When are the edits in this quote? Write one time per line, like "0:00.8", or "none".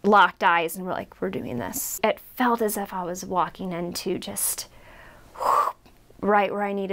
0:02.0